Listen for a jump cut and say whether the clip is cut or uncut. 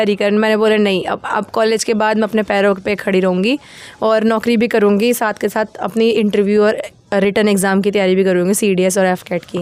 uncut